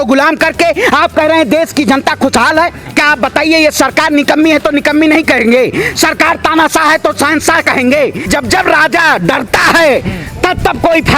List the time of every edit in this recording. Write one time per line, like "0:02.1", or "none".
0:02.8
0:08.3